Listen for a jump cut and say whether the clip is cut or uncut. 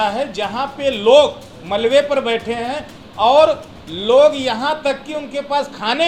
uncut